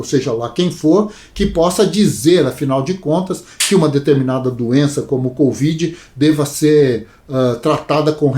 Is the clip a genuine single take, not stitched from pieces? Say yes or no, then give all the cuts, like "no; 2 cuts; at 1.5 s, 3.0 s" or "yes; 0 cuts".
yes; 0 cuts